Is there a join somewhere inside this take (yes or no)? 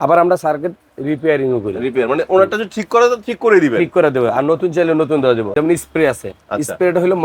yes